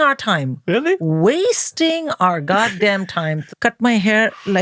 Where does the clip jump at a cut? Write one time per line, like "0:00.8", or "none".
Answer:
0:03.4